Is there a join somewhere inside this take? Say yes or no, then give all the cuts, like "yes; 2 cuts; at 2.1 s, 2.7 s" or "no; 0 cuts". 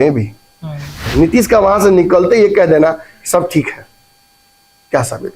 yes; 1 cut; at 1.0 s